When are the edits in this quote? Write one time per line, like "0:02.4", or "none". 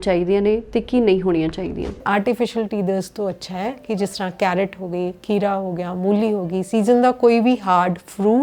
0:02.0